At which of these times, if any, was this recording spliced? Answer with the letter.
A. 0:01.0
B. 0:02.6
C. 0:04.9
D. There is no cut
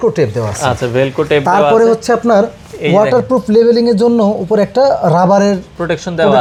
D